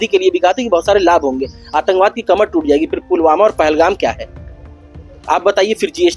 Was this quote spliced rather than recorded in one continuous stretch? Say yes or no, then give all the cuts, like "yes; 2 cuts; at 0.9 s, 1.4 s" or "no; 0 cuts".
no; 0 cuts